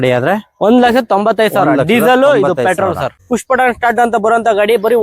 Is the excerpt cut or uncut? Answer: cut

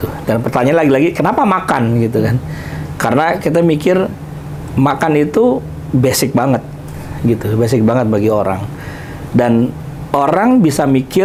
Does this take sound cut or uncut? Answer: uncut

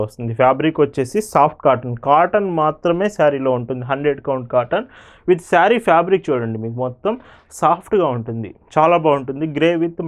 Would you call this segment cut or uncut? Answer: uncut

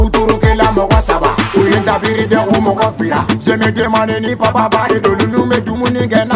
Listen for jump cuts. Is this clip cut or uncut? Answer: uncut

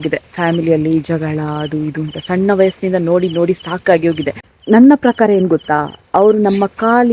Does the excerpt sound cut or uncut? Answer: cut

